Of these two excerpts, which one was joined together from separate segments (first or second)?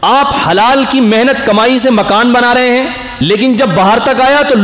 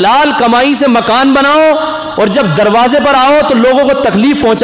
first